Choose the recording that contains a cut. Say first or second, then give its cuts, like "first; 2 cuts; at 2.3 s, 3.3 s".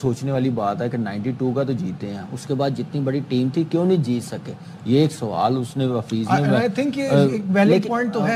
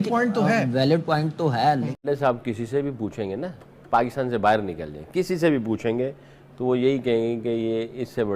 second; 1 cut; at 2.0 s